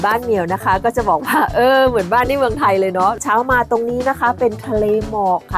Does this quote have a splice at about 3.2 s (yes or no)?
yes